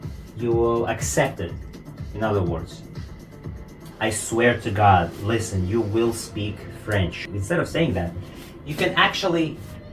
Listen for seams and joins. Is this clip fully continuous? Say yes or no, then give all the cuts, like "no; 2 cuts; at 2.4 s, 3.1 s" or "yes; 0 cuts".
no; 2 cuts; at 3.8 s, 7.2 s